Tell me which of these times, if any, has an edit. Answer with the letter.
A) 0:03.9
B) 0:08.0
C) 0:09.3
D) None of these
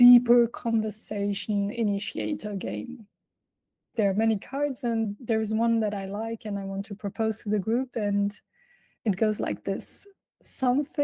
A